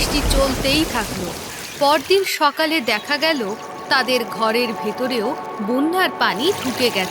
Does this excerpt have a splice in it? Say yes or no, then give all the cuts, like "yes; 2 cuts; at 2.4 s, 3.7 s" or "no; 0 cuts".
no; 0 cuts